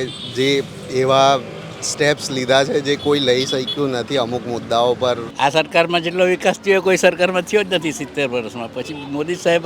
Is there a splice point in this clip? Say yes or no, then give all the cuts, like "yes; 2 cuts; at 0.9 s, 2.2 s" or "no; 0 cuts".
yes; 1 cut; at 5.3 s